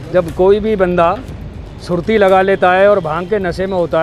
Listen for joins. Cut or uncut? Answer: uncut